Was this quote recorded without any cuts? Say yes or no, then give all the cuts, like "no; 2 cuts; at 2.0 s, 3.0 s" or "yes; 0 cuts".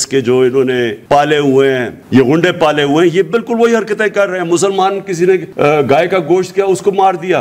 no; 3 cuts; at 1.0 s, 1.9 s, 5.5 s